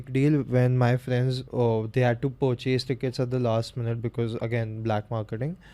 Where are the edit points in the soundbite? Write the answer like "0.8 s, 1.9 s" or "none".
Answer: 1.4 s